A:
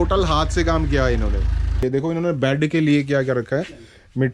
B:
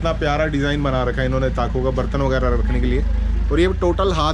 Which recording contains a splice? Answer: A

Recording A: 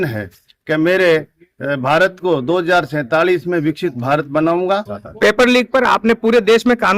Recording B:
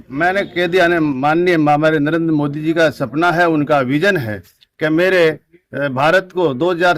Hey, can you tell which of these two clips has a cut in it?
A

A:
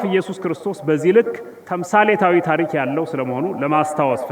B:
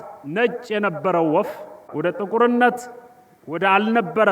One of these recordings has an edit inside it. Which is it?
B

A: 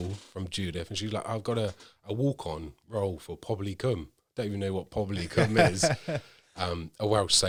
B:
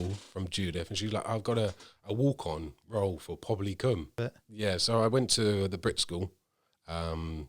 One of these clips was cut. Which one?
B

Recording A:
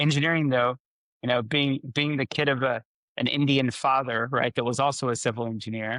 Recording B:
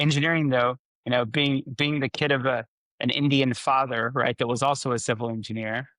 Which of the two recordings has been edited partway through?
B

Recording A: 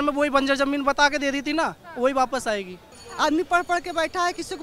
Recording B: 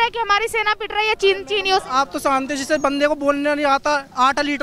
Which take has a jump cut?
A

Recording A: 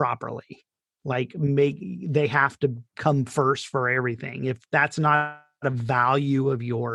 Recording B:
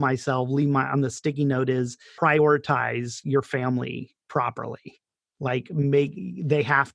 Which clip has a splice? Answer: B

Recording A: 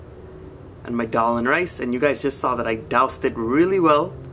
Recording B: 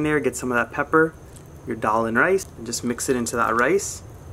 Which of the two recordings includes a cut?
B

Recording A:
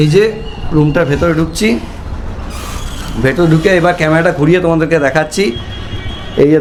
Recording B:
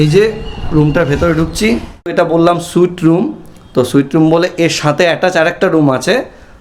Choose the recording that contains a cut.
B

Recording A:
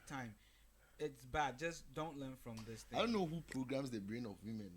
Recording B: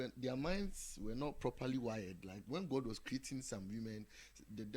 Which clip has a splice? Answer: A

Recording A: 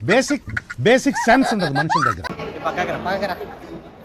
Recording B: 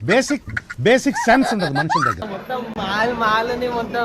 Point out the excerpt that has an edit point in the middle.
B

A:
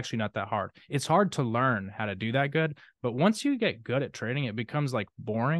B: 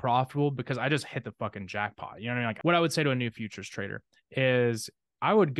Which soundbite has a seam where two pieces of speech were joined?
B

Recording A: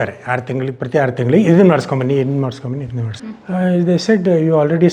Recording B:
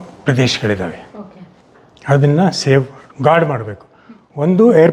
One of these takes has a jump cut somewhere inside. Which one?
A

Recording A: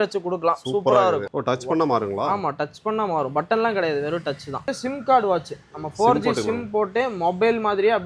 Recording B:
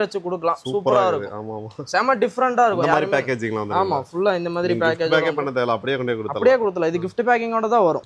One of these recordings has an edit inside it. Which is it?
A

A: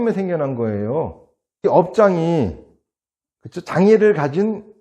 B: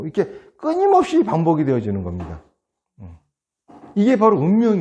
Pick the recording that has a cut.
A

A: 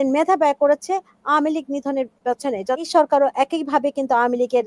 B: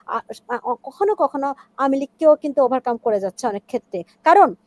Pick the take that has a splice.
A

